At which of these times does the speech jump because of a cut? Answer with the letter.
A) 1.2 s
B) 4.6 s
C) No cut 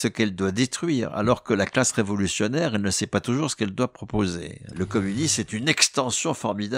B